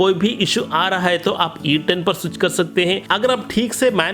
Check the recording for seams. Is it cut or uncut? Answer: uncut